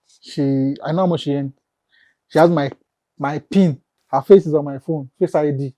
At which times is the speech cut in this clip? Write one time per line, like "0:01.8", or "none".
0:03.9